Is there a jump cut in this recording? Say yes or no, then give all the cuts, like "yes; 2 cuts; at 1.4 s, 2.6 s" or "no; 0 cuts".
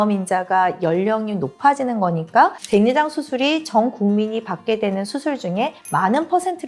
no; 0 cuts